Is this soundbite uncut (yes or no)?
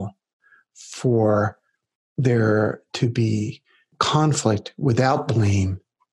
no